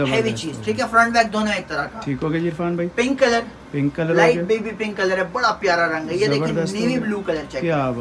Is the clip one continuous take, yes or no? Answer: yes